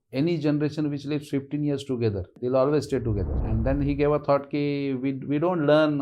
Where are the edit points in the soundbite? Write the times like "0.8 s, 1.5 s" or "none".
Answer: 2.3 s, 3.4 s

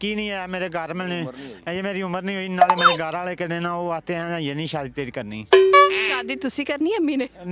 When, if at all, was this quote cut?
6.1 s

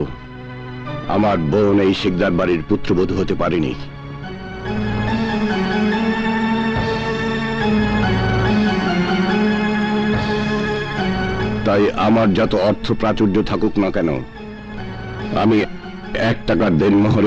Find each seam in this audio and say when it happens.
none

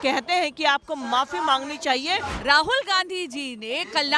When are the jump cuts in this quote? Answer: 2.3 s

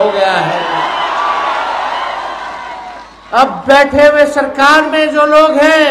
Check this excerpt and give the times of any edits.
none

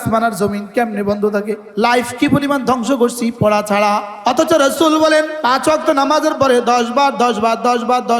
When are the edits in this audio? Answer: 1.6 s, 4.1 s, 5.4 s

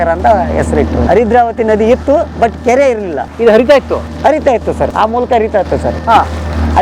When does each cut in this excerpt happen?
1.1 s

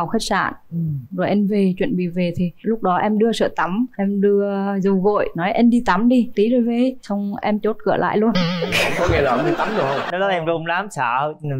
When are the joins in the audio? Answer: 10.1 s

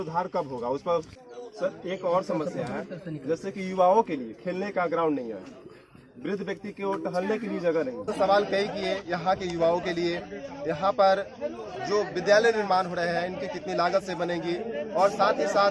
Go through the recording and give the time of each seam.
1.2 s, 8.1 s

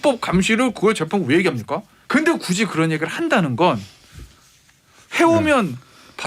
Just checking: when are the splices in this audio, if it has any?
1.9 s

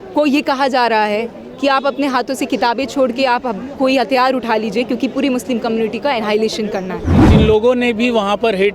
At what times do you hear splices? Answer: 7.2 s

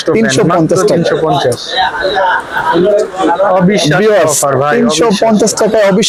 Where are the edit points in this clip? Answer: none

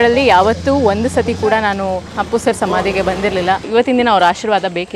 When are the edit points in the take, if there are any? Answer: 2.1 s, 3.7 s

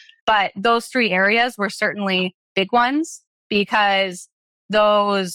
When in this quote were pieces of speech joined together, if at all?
none

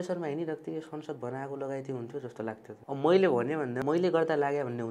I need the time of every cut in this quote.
2.7 s, 3.8 s

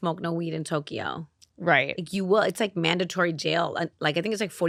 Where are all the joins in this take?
none

